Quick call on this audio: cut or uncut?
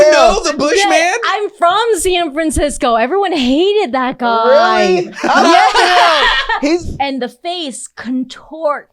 cut